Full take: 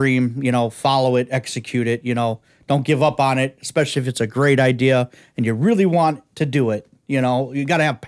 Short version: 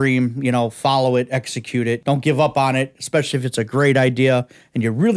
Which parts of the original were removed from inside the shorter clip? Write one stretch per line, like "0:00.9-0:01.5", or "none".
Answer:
0:02.0-0:02.6